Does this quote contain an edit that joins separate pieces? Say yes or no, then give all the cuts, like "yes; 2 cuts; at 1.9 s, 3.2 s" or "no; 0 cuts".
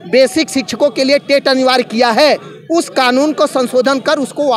no; 0 cuts